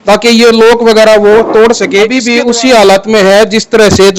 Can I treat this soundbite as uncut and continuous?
no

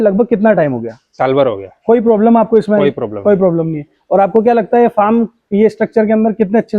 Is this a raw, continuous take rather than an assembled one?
yes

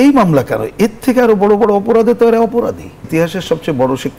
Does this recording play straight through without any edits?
no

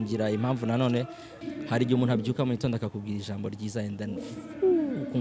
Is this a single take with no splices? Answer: no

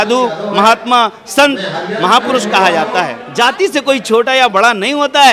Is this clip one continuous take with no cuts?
no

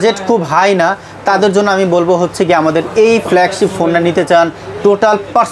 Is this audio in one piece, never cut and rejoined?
yes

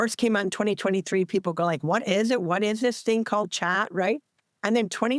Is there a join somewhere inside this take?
no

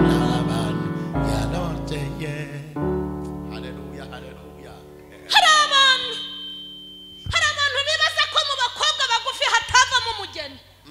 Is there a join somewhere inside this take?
no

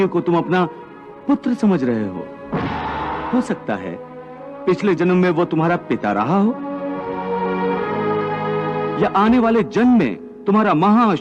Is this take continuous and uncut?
no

